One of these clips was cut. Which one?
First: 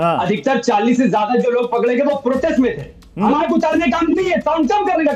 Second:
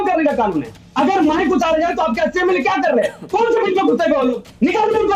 first; 1 cut; at 3.3 s

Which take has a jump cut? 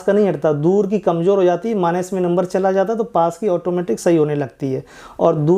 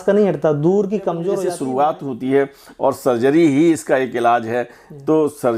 second; 1 cut; at 1.3 s

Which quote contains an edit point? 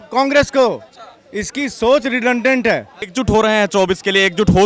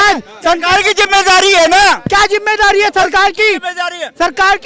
first; 1 cut; at 3.0 s

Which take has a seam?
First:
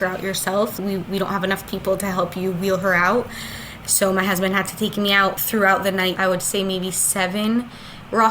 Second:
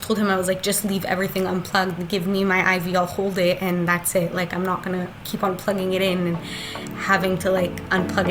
first; 3 cuts; at 0.7 s, 5.4 s, 6.2 s

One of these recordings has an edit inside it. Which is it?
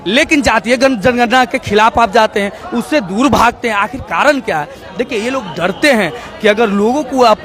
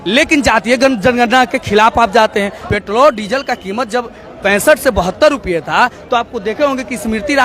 second; 2 cuts; at 2.6 s, 4.2 s

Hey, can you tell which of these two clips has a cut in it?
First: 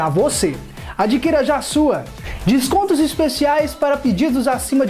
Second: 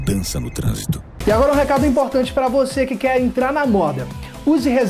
second; 1 cut; at 1.1 s

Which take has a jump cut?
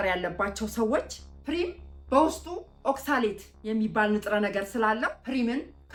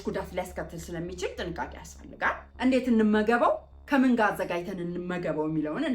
second; 1 cut; at 2.5 s

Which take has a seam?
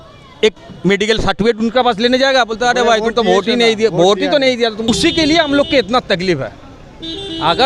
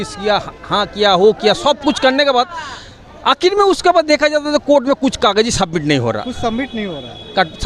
first; 1 cut; at 4.9 s

